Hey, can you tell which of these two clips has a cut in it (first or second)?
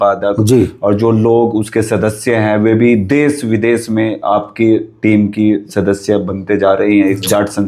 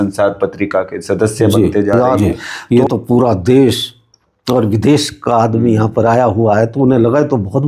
second